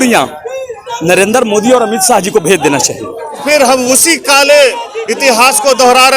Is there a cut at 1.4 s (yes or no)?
no